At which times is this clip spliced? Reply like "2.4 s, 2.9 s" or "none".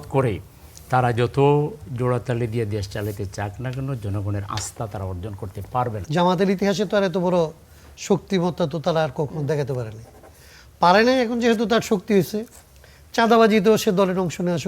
6.0 s